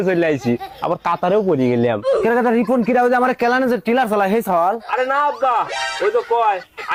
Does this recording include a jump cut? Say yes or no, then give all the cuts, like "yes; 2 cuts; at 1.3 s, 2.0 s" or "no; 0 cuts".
no; 0 cuts